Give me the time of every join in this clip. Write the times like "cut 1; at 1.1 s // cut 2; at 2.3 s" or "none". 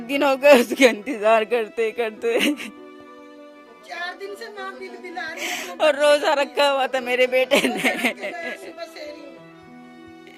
none